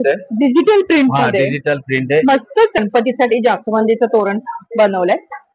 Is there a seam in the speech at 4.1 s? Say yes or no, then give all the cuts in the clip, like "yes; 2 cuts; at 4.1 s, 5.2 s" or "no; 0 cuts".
no; 1 cut; at 2.8 s